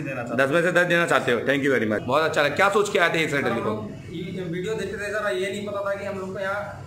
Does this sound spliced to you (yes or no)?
yes